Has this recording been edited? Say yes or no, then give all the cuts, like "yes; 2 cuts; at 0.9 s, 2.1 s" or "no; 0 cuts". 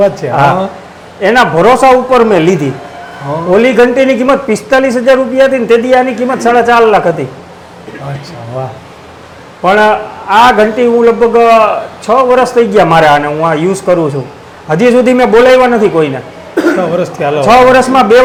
no; 0 cuts